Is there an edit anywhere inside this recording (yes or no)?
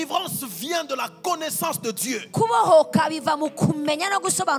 no